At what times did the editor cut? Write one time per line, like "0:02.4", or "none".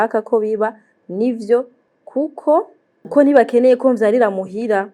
0:03.1